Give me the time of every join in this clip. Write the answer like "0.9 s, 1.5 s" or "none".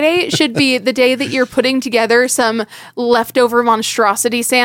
none